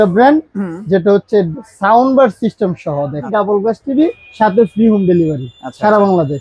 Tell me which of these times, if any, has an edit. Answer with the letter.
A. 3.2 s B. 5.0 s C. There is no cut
A